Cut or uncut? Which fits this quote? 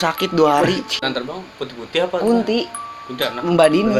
cut